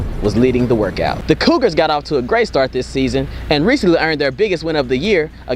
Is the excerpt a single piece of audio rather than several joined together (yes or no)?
no